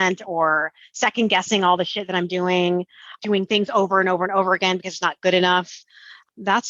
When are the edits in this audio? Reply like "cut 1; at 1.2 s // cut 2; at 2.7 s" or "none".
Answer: cut 1; at 3.2 s

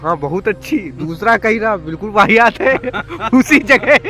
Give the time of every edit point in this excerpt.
none

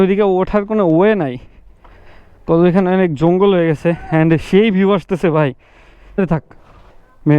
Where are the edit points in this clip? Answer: cut 1; at 6.2 s

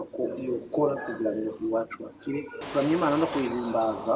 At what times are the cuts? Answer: cut 1; at 2.6 s

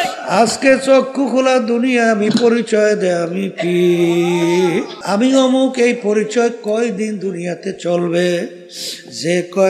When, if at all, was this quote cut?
cut 1; at 5.0 s

